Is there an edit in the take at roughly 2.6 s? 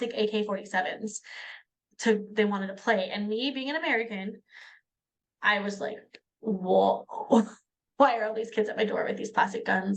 no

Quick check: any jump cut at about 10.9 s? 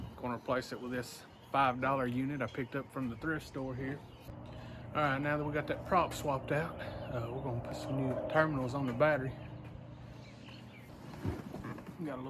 yes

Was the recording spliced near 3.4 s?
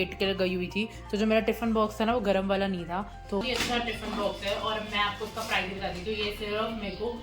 yes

